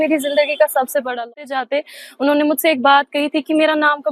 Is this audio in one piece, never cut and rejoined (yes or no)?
no